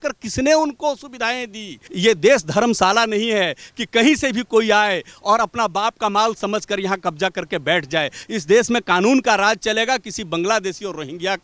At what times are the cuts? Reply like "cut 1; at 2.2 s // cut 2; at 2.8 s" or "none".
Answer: cut 1; at 1.8 s // cut 2; at 8.2 s